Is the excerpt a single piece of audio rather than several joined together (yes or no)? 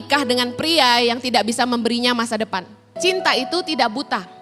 no